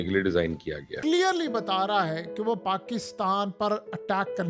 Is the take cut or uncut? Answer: cut